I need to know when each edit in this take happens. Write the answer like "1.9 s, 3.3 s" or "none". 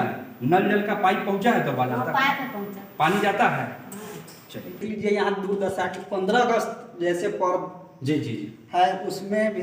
4.8 s